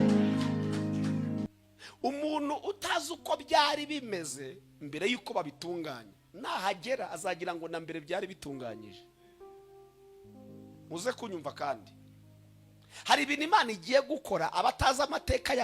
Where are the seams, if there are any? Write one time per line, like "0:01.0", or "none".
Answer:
0:01.5